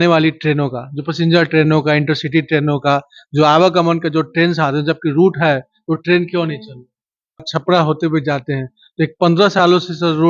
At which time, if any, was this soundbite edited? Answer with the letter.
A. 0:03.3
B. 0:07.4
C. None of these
B